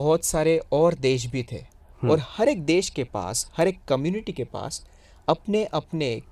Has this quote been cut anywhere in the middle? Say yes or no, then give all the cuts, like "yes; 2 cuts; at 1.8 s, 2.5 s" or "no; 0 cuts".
no; 0 cuts